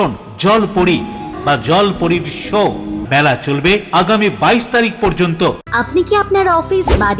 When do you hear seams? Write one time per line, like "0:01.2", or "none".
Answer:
0:01.3
0:03.0
0:05.6